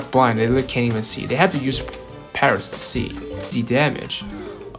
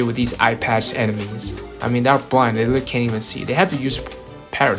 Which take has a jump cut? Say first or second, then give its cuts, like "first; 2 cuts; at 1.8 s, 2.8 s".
first; 1 cut; at 3.5 s